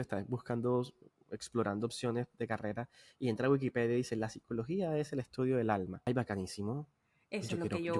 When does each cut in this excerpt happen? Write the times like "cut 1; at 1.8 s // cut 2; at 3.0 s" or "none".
cut 1; at 6.1 s